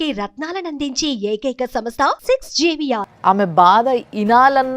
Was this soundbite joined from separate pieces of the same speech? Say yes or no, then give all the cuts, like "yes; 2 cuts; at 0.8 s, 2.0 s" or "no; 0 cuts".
yes; 1 cut; at 3.1 s